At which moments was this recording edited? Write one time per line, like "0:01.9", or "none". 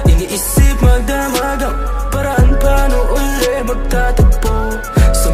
none